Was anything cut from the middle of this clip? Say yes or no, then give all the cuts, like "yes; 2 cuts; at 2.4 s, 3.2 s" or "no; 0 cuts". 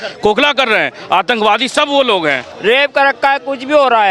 yes; 1 cut; at 2.5 s